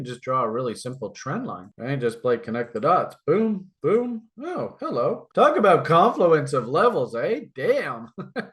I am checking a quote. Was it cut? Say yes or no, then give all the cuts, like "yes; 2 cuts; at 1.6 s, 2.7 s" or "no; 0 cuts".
no; 0 cuts